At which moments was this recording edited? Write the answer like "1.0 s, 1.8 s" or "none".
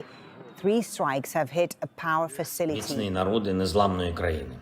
2.9 s